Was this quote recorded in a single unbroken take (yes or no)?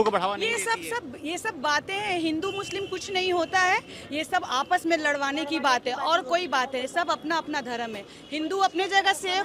yes